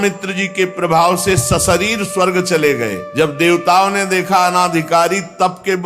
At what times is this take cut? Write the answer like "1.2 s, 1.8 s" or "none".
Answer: 3.0 s